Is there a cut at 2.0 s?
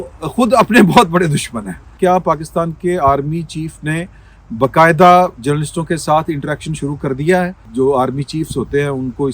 yes; 2 cuts; at 2.0 s, 7.6 s

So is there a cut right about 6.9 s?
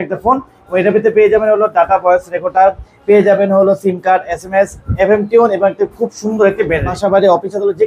yes; 1 cut; at 6.9 s

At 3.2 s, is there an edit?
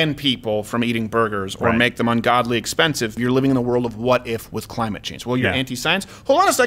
yes; 1 cut; at 3.2 s

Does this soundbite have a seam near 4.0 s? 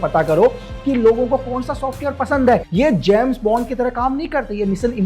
no; 1 cut; at 2.7 s

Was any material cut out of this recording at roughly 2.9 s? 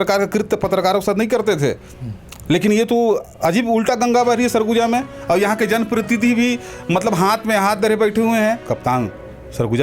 no; 1 cut; at 8.7 s

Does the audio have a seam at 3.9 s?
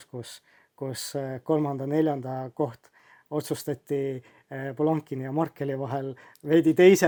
no; 0 cuts

